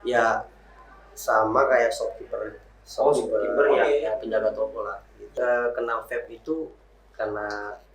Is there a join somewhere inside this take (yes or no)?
yes